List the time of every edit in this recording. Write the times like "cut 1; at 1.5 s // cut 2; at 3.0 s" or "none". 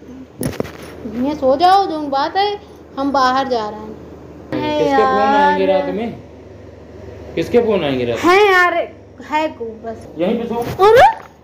cut 1; at 4.5 s // cut 2; at 10.0 s